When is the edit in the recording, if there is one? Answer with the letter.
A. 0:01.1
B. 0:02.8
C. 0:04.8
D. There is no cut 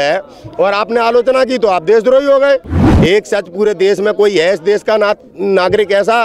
B